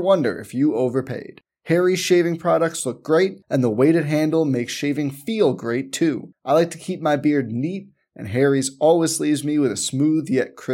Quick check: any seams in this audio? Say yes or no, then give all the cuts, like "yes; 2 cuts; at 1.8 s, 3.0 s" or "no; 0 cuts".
no; 0 cuts